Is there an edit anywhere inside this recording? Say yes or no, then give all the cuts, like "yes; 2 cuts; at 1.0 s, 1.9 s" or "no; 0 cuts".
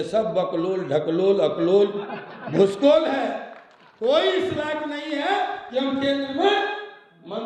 no; 0 cuts